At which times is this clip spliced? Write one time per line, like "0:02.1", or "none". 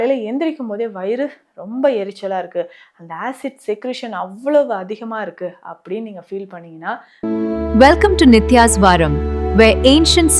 0:07.1